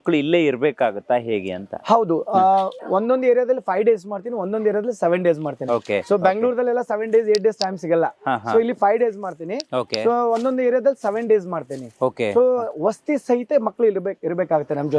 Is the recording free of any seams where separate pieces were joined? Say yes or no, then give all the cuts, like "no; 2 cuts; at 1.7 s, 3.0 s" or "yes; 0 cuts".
yes; 0 cuts